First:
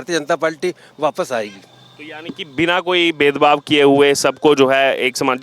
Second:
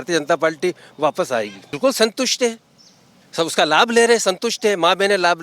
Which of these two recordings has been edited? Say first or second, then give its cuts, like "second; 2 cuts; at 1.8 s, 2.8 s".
second; 1 cut; at 1.8 s